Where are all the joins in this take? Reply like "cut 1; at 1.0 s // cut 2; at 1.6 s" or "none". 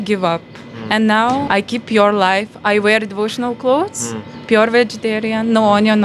cut 1; at 1.5 s

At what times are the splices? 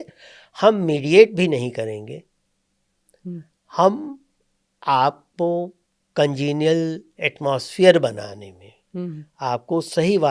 none

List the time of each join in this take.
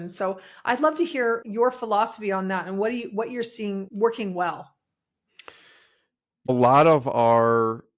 cut 1; at 1.5 s // cut 2; at 3.9 s // cut 3; at 6.5 s

